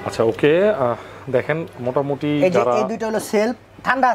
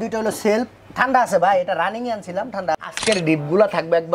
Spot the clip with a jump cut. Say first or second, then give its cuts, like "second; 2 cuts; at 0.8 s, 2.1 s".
second; 1 cut; at 2.8 s